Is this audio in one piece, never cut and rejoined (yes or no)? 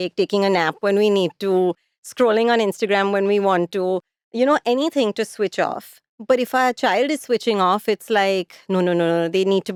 yes